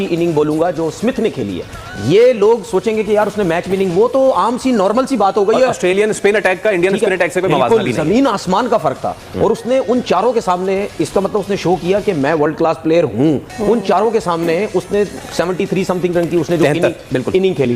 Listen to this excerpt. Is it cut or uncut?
uncut